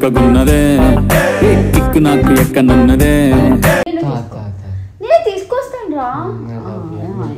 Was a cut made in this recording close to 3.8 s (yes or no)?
yes